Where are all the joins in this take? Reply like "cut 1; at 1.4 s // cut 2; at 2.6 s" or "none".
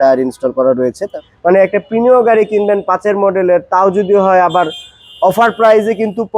cut 1; at 1.1 s

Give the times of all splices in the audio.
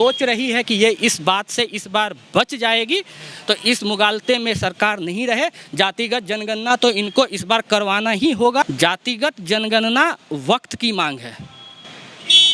cut 1; at 8.6 s

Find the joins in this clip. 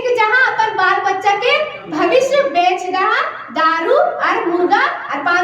none

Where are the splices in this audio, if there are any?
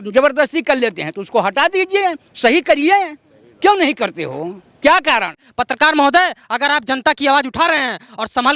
cut 1; at 5.4 s

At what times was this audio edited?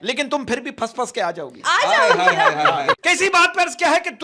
cut 1; at 2.9 s

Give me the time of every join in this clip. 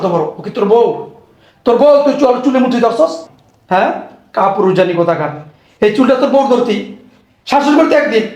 none

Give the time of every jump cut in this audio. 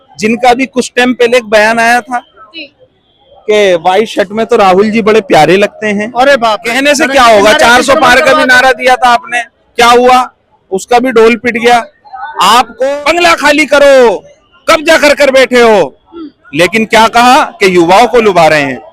cut 1; at 6.7 s // cut 2; at 12.8 s

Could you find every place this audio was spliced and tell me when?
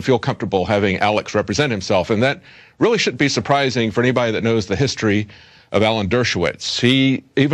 none

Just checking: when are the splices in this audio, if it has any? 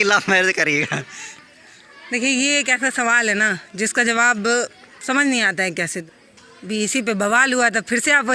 cut 1; at 6.0 s

